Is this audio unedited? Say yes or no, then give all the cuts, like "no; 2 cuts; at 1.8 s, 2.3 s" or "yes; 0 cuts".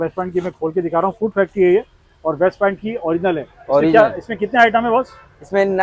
yes; 0 cuts